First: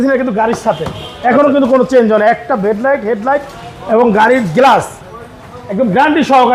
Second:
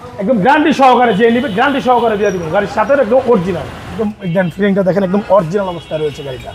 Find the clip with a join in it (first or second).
second